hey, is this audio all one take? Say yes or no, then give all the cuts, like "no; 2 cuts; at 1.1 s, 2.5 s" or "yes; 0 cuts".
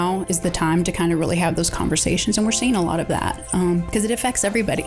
yes; 0 cuts